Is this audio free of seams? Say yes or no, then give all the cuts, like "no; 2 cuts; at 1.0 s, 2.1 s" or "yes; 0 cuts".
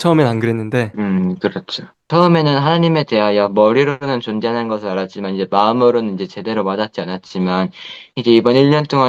no; 2 cuts; at 0.9 s, 1.9 s